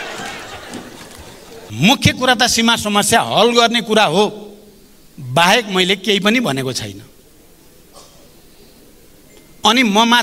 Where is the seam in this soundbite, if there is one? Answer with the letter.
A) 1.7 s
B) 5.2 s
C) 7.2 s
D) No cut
A